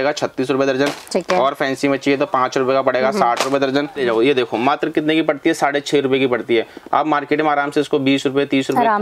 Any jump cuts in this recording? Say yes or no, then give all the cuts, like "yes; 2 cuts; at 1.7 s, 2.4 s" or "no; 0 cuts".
yes; 1 cut; at 4.0 s